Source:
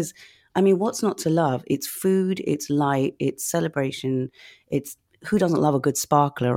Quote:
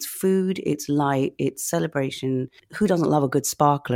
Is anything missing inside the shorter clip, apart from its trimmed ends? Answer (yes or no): yes